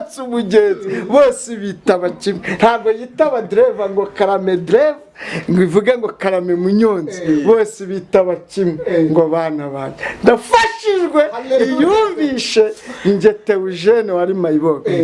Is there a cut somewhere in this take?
no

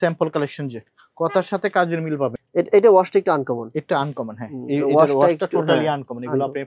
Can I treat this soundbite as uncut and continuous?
no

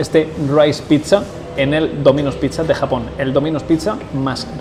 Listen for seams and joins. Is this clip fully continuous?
yes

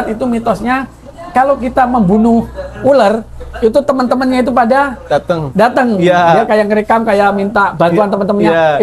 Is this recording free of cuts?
yes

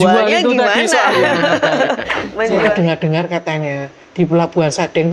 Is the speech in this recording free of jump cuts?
no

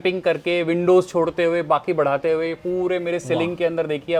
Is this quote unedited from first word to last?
yes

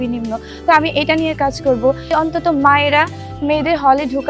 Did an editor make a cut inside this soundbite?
yes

